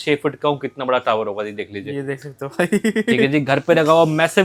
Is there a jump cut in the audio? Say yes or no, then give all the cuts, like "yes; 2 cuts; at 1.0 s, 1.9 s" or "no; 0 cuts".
no; 0 cuts